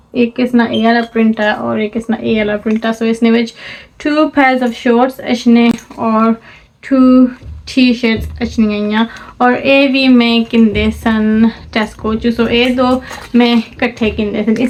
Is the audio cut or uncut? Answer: uncut